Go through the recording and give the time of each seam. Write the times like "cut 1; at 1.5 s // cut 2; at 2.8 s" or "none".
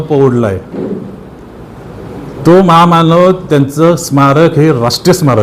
none